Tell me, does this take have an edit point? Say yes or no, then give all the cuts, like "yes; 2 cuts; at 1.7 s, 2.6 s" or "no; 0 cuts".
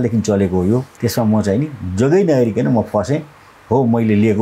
yes; 1 cut; at 1.0 s